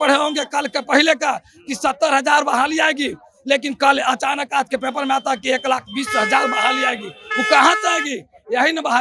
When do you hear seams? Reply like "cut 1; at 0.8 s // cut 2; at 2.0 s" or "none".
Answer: none